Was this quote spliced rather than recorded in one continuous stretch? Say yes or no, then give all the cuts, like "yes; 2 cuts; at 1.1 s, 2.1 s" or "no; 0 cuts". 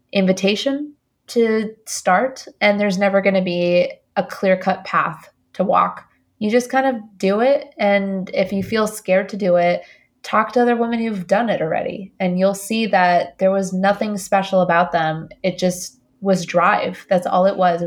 no; 0 cuts